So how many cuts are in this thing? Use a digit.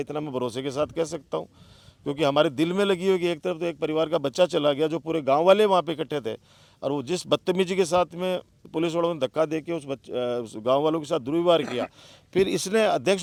0